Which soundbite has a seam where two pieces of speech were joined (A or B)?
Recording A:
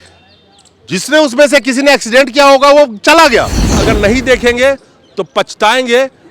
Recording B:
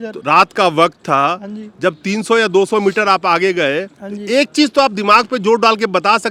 A